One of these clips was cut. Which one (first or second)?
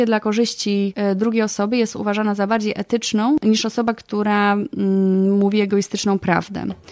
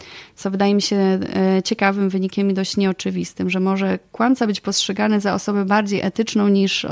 first